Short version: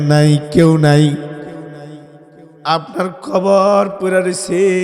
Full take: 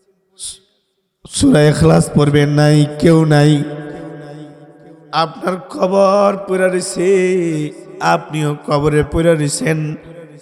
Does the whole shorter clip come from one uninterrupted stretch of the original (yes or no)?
yes